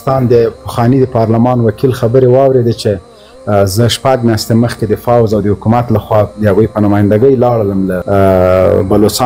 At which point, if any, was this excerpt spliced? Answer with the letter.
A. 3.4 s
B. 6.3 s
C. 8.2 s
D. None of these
D